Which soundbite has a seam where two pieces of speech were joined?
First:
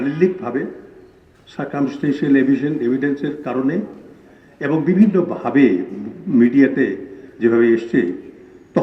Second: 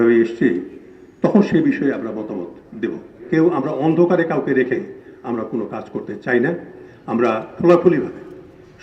second; 1 cut; at 3.3 s

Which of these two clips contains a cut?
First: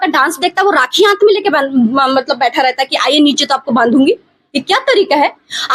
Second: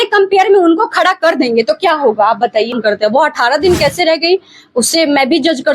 second; 1 cut; at 2.8 s

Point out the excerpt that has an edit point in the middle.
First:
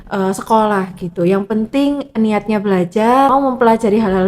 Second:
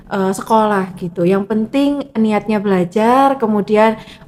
first; 1 cut; at 3.3 s

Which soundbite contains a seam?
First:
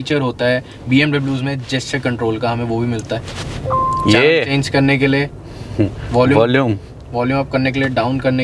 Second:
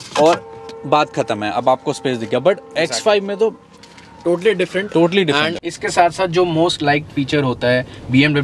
second; 1 cut; at 5.6 s

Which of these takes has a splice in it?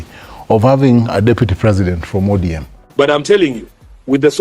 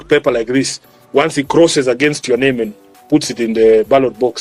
first; 1 cut; at 2.8 s

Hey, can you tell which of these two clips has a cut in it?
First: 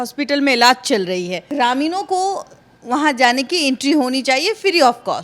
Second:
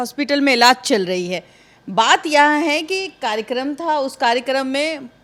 first; 1 cut; at 1.4 s

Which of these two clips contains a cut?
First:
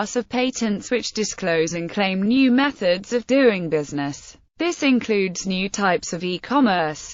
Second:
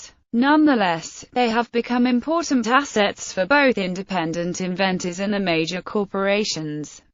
second; 1 cut; at 6.1 s

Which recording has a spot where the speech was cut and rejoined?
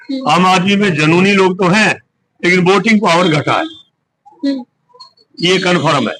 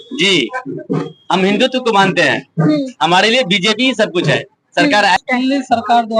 second; 1 cut; at 5.2 s

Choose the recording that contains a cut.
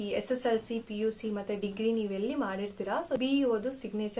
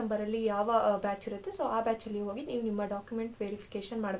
first; 1 cut; at 3.2 s

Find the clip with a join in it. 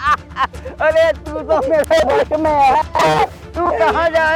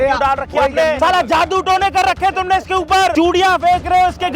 second; 2 cuts; at 1.0 s, 3.1 s

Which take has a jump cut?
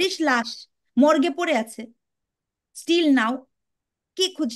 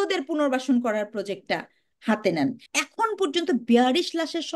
second; 1 cut; at 2.6 s

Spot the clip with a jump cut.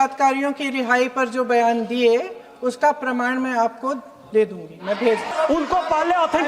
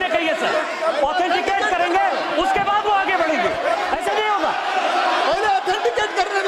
first; 1 cut; at 5.3 s

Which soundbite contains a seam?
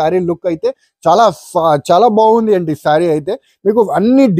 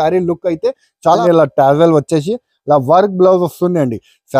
second; 1 cut; at 1.2 s

